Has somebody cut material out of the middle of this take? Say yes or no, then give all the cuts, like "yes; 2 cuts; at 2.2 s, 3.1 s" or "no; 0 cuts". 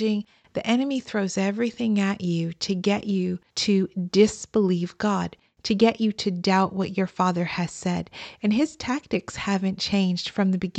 yes; 1 cut; at 3.5 s